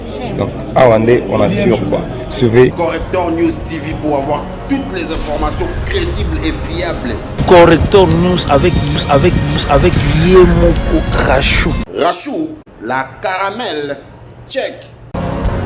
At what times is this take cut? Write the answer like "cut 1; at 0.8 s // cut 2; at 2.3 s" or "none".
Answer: none